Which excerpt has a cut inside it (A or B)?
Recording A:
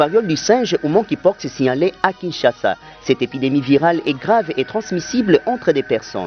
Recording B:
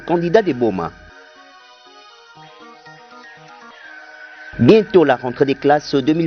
B